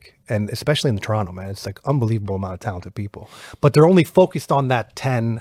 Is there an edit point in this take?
no; 0 cuts

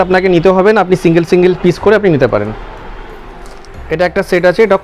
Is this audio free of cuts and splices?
yes; 0 cuts

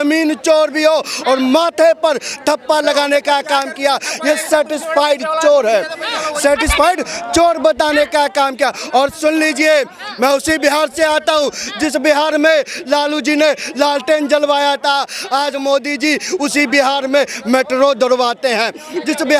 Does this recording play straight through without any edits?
yes; 0 cuts

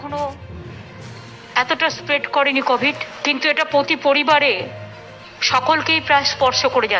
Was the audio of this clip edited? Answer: yes; 1 cut; at 3.1 s

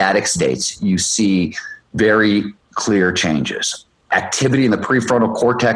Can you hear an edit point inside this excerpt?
no; 0 cuts

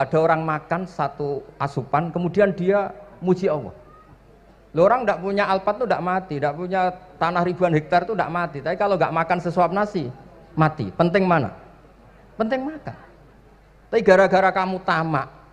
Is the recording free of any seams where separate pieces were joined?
yes; 0 cuts

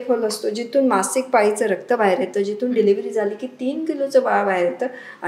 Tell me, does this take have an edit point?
no; 0 cuts

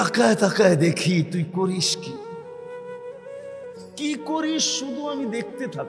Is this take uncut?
no; 2 cuts; at 1.8 s, 3.5 s

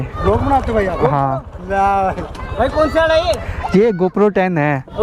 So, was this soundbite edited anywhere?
no; 0 cuts

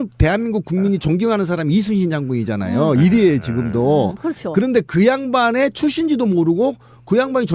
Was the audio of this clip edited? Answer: yes; 1 cut; at 5.4 s

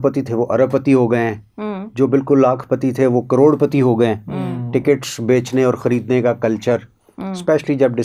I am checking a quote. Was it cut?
no; 0 cuts

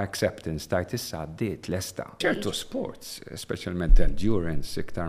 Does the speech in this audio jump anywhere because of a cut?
yes; 1 cut; at 2.2 s

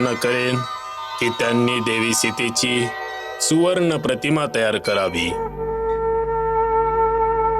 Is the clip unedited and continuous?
no; 1 cut; at 5.4 s

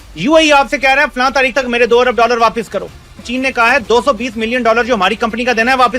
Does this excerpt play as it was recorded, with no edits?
no; 1 cut; at 3.2 s

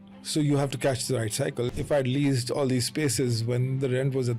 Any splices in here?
yes; 1 cut; at 1.7 s

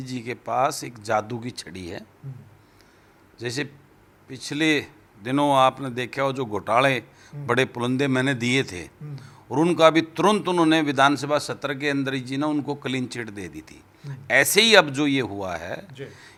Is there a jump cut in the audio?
no; 0 cuts

